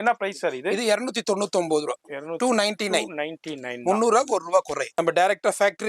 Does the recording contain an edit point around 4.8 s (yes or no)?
yes